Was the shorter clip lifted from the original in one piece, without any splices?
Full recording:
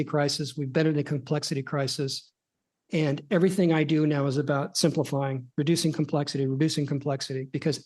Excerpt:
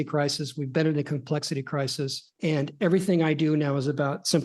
no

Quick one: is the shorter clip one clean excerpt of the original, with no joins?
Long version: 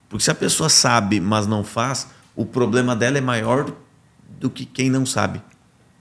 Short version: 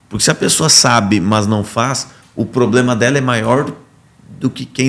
yes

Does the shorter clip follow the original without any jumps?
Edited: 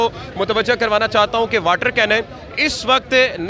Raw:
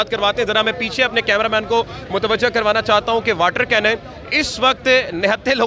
yes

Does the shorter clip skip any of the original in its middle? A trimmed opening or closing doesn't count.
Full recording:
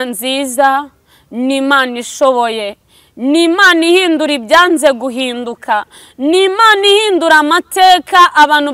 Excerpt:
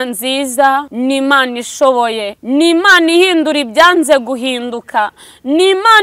yes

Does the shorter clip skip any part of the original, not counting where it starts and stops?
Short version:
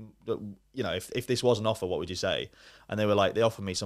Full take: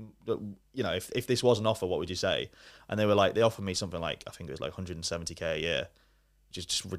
no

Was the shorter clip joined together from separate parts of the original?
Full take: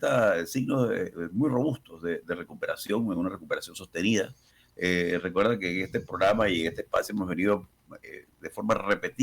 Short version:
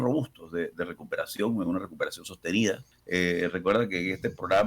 yes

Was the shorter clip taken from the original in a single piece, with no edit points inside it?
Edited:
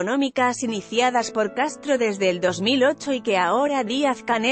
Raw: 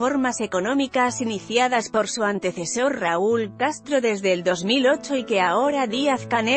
no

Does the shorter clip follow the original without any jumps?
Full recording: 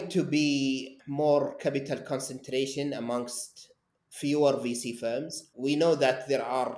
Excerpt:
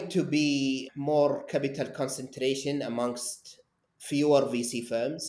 no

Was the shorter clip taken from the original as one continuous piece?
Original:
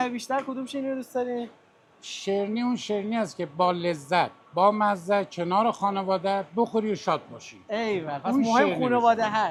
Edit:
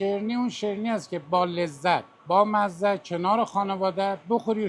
yes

